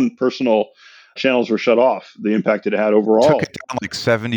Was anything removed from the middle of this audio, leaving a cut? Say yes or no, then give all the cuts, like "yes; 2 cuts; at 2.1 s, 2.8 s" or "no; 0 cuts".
yes; 1 cut; at 1.2 s